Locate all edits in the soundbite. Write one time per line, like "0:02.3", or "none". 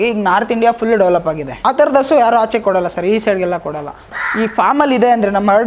0:01.5
0:04.2